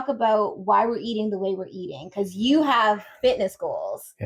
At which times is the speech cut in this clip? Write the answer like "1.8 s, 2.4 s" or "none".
none